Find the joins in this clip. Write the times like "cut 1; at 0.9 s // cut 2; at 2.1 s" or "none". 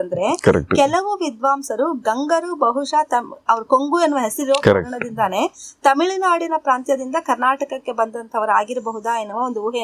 none